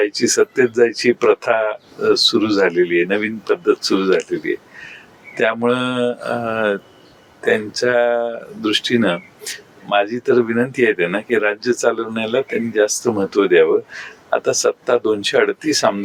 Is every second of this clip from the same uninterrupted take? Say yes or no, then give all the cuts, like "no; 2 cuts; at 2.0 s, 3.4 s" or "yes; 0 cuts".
yes; 0 cuts